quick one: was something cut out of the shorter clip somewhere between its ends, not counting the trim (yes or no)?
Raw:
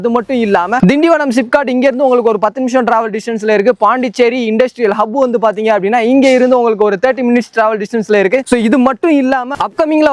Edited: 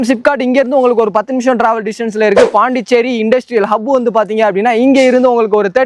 no